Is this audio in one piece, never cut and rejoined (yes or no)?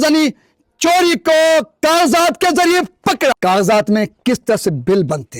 yes